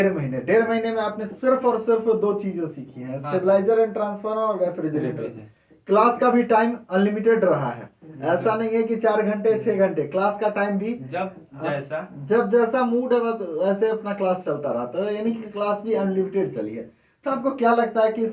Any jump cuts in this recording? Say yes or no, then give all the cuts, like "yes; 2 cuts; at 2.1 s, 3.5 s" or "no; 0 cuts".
no; 0 cuts